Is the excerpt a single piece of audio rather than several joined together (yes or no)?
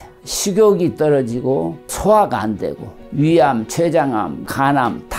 no